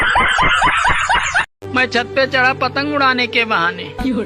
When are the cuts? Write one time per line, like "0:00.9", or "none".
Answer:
none